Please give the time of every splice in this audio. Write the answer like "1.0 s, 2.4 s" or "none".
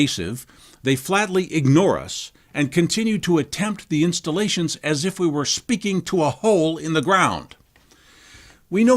6.7 s